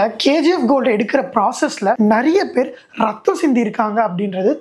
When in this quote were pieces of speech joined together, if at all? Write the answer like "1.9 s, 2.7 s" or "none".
2.0 s